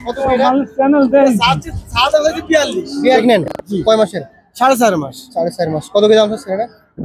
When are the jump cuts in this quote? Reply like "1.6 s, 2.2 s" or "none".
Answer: 3.2 s

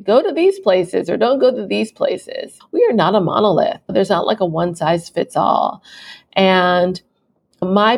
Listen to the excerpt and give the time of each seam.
none

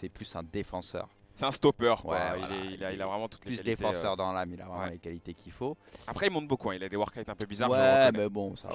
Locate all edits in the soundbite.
7.6 s

